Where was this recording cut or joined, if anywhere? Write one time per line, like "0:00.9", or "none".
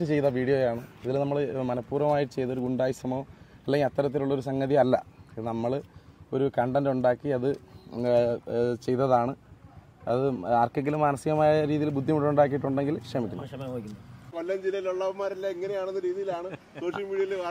0:14.3